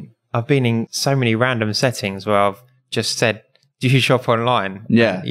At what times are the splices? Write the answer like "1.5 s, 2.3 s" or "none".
0.9 s

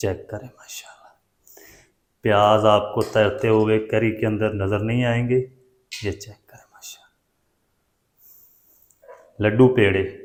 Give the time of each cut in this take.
none

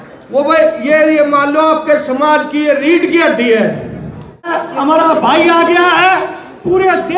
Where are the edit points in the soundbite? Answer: 4.5 s

